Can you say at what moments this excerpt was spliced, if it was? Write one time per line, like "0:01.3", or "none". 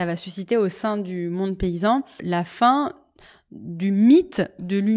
0:02.2